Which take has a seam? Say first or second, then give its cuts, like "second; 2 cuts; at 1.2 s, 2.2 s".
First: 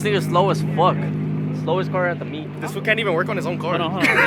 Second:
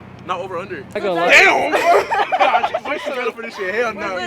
second; 1 cut; at 0.9 s